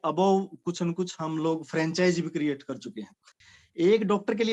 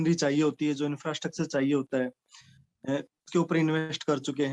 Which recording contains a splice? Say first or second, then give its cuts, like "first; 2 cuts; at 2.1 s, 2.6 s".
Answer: first; 1 cut; at 3.2 s